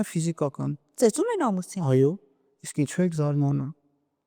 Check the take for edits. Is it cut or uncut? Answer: uncut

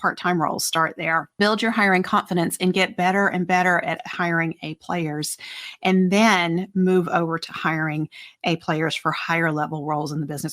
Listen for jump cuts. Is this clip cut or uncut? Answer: cut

